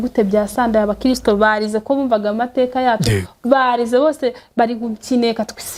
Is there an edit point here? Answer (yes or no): no